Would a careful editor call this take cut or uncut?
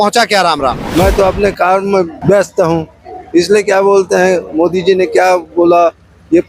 cut